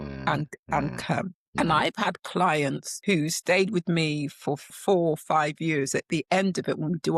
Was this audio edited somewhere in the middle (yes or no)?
yes